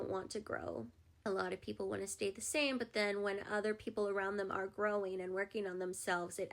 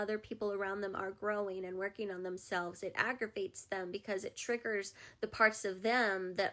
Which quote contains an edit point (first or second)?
first